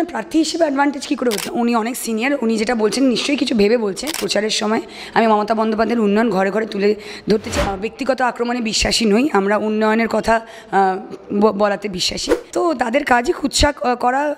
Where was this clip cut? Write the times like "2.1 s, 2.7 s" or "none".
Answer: 1.5 s, 4.2 s, 7.7 s, 12.4 s